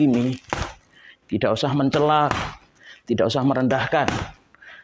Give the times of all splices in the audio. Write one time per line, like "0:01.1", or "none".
none